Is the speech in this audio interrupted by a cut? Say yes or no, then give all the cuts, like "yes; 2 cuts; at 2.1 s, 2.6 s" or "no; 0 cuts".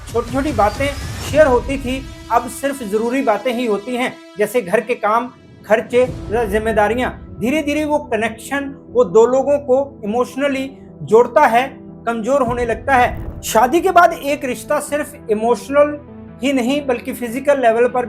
yes; 1 cut; at 13.2 s